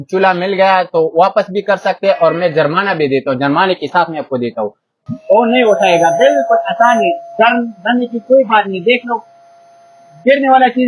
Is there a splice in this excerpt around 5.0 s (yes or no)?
yes